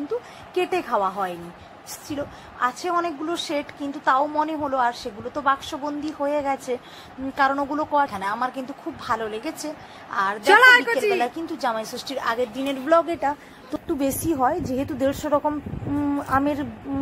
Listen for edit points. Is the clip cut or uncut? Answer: cut